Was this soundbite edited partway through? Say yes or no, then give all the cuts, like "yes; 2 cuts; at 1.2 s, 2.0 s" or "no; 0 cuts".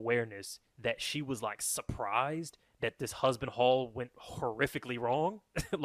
no; 0 cuts